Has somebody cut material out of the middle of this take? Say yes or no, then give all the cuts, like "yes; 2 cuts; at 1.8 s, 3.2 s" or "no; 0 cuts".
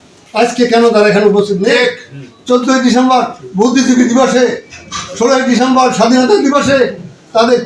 yes; 1 cut; at 2.4 s